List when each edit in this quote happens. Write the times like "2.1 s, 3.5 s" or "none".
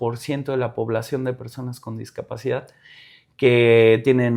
none